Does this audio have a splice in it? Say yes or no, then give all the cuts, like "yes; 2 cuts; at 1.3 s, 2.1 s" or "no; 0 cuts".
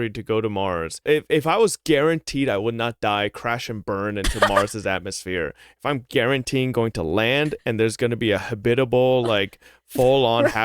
yes; 1 cut; at 1.0 s